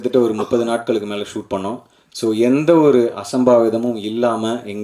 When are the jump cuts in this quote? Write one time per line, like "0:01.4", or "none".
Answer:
none